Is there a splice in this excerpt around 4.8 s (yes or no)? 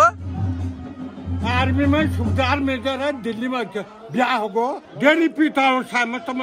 yes